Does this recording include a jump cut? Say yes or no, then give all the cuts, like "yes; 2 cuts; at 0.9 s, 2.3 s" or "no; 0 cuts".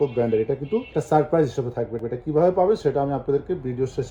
no; 0 cuts